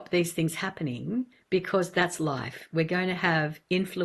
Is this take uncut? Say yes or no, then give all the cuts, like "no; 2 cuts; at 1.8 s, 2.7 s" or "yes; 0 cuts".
yes; 0 cuts